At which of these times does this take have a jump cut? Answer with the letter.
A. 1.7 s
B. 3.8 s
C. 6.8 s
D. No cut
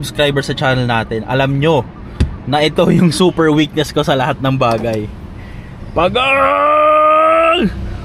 D